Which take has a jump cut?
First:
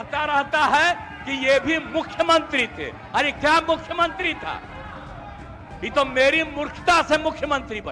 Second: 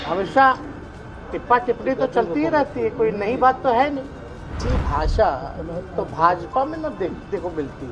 second; 1 cut; at 4.6 s

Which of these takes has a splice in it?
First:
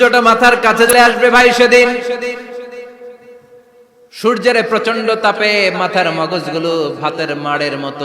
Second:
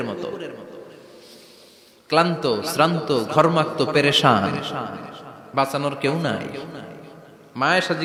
first; 1 cut; at 0.9 s

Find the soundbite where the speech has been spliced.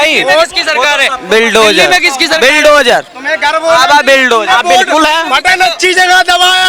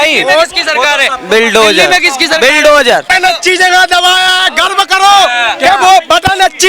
second; 1 cut; at 3.1 s

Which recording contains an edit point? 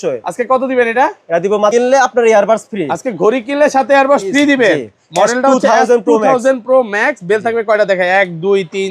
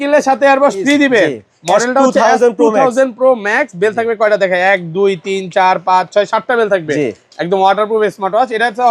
first; 1 cut; at 1.7 s

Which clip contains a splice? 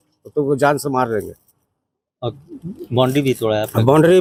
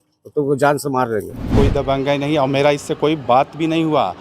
second; 1 cut; at 1.5 s

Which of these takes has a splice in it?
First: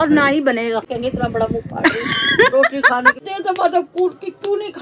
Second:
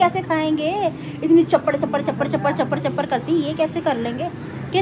first; 3 cuts; at 0.9 s, 2.2 s, 3.2 s

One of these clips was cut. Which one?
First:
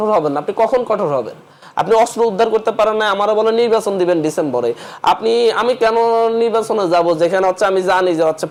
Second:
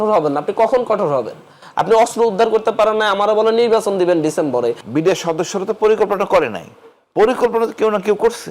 second; 1 cut; at 4.8 s

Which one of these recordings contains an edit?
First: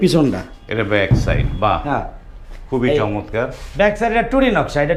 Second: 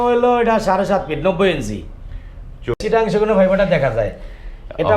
second; 1 cut; at 2.8 s

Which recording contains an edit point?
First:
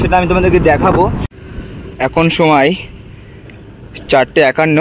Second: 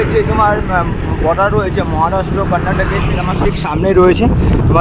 first; 1 cut; at 1.2 s

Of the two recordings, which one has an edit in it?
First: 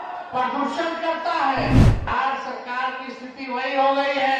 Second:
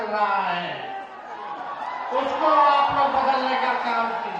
first; 1 cut; at 2.1 s

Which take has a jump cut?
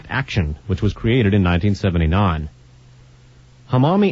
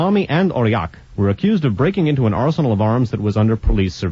first; 1 cut; at 2.7 s

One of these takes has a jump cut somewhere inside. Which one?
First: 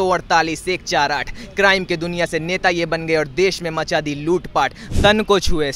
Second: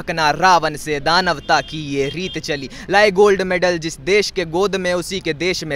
first; 1 cut; at 4.8 s

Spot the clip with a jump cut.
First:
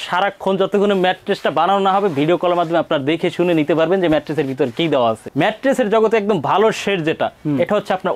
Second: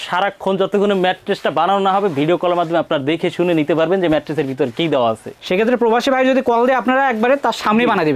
first; 1 cut; at 5.3 s

